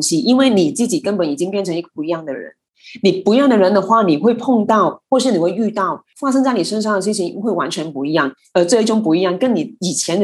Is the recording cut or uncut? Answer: cut